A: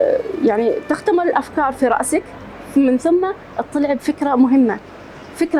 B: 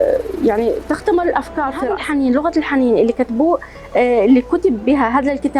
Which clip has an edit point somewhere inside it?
B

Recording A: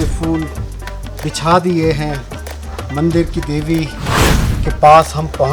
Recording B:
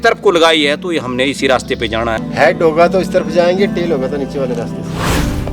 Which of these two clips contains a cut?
B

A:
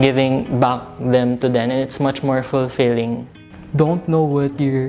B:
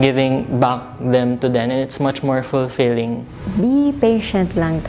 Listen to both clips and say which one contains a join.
A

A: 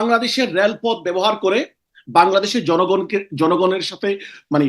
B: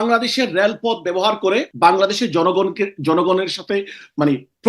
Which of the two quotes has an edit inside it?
B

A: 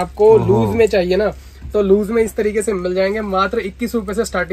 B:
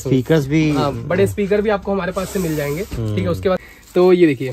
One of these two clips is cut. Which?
B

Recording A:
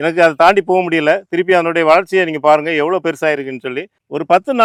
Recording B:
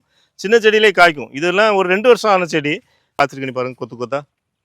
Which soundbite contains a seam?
B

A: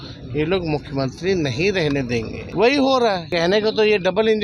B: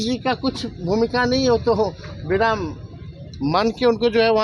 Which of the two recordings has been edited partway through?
A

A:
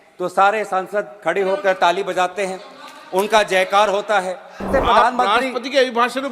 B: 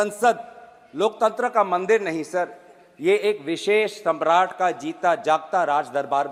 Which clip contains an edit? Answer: A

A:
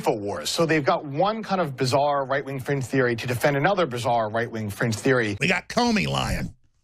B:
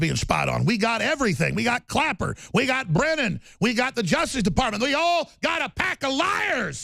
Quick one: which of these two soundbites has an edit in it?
A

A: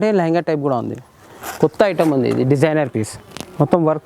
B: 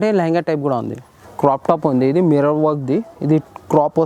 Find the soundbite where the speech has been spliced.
B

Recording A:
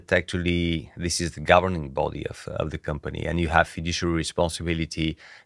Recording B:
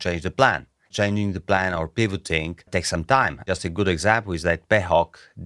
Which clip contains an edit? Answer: B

